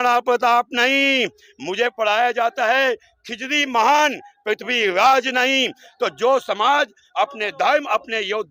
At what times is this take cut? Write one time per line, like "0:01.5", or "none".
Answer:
none